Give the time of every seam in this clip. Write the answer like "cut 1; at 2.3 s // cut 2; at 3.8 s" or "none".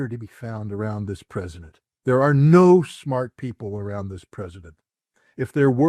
none